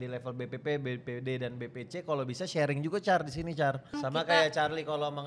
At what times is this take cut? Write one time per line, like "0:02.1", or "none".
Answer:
0:03.9